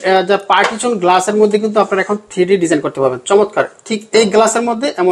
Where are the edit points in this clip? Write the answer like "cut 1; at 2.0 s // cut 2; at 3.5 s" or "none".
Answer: none